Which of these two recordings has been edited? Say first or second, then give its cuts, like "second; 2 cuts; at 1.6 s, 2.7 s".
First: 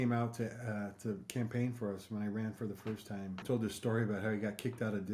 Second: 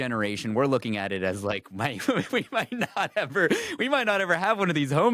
first; 1 cut; at 3.4 s